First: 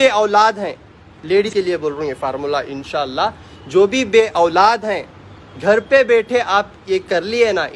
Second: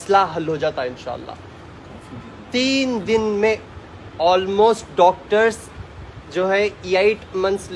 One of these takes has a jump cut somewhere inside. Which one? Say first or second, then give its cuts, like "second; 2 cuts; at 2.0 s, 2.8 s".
first; 1 cut; at 1.5 s